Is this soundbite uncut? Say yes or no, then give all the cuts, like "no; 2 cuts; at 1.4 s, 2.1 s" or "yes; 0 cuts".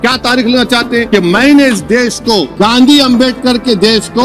no; 2 cuts; at 1.1 s, 2.5 s